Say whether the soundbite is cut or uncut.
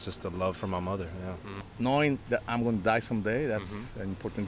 cut